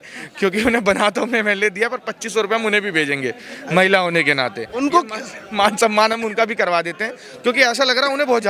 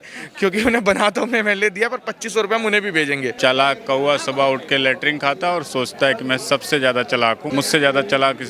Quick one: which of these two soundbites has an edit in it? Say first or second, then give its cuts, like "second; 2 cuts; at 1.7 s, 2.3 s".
second; 2 cuts; at 3.3 s, 7.4 s